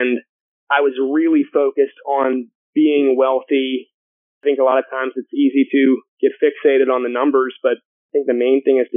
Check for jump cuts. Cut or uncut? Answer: cut